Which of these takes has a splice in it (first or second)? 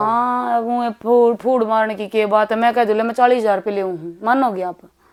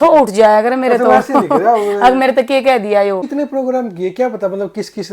second